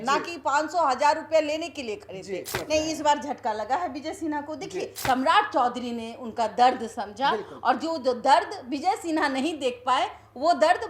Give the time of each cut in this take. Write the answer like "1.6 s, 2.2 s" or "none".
2.6 s, 4.9 s